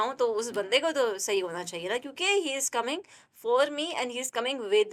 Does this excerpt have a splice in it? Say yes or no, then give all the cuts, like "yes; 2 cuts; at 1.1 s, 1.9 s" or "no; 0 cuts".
no; 0 cuts